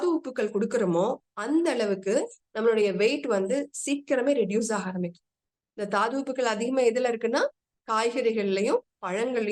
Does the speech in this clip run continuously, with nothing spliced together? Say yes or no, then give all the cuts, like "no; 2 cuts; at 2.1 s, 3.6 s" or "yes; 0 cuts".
yes; 0 cuts